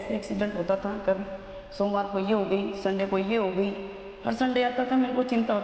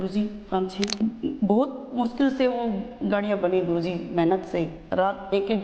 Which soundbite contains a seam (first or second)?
second